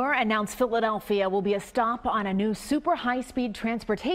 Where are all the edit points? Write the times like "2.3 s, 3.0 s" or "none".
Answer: none